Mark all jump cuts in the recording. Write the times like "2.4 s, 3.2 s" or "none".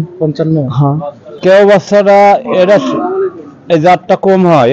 1.4 s

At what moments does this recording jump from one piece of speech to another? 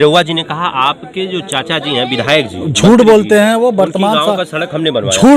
none

